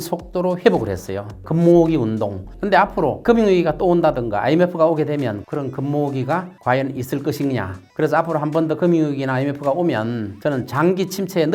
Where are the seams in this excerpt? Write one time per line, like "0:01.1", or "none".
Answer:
0:01.4
0:02.6
0:05.4
0:07.8